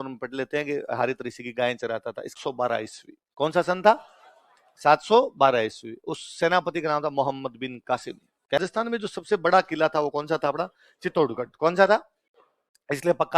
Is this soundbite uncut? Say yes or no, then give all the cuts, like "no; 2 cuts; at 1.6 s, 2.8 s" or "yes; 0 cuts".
no; 2 cuts; at 2.3 s, 8.6 s